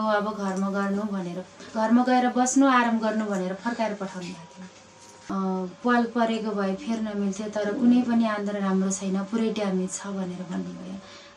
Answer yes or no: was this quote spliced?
yes